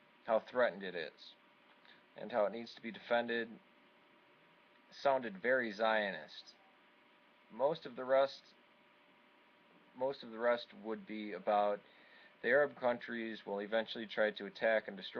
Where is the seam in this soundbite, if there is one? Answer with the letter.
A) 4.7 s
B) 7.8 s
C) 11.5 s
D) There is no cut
A